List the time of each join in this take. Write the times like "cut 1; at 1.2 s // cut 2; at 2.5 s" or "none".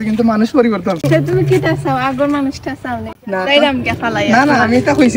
cut 1; at 1.0 s // cut 2; at 3.1 s

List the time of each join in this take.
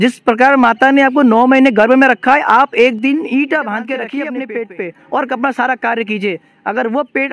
cut 1; at 4.1 s

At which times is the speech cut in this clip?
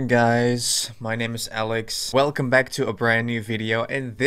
cut 1; at 2.0 s

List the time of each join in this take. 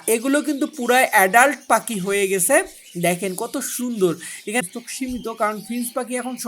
cut 1; at 4.6 s

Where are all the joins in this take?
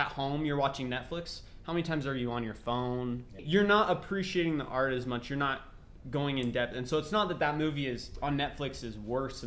cut 1; at 3.4 s

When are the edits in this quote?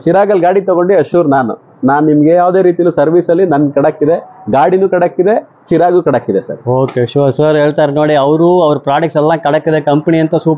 none

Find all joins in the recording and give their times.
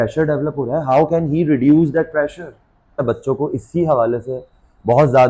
cut 1; at 3.0 s

